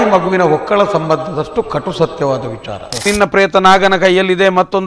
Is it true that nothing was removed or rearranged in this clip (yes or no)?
no